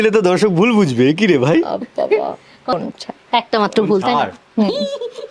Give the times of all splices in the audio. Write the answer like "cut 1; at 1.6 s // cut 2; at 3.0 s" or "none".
cut 1; at 2.8 s